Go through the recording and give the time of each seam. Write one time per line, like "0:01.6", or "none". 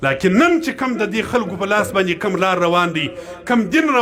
none